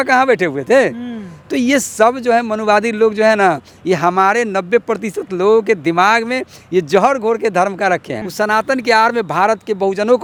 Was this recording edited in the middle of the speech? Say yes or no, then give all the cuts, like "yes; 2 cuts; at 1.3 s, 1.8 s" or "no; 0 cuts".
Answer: no; 0 cuts